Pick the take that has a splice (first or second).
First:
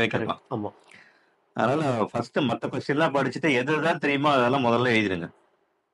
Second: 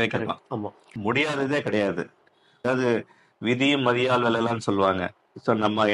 second